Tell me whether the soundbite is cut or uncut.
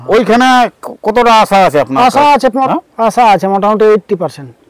cut